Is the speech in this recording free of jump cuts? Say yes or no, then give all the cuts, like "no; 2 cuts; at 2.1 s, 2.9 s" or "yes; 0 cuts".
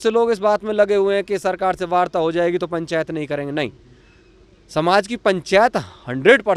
yes; 0 cuts